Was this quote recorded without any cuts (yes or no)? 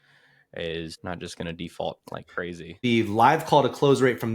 no